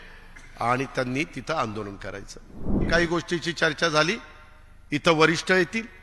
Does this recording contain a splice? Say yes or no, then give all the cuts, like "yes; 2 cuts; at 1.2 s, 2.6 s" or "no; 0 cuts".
yes; 1 cut; at 2.8 s